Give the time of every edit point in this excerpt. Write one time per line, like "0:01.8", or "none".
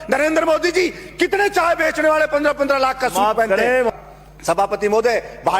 0:03.9